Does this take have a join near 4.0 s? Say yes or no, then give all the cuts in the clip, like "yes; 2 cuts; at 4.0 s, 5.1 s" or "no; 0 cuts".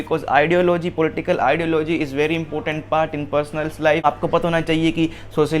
yes; 1 cut; at 4.0 s